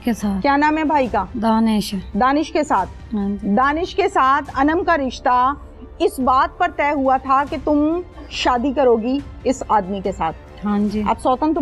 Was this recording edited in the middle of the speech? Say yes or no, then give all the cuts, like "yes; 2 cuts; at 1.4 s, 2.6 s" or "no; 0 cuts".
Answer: yes; 1 cut; at 10.4 s